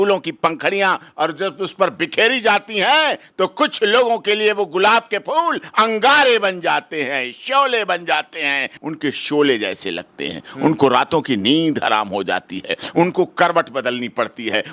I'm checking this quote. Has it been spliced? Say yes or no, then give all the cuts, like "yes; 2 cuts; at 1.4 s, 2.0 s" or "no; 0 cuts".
yes; 1 cut; at 8.7 s